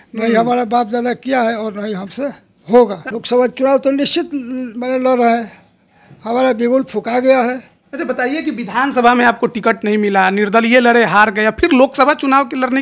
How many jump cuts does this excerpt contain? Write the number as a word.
one